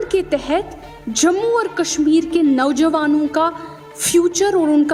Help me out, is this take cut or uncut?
uncut